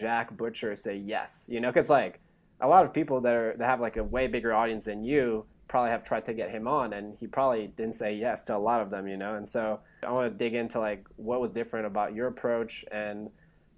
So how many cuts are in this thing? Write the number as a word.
two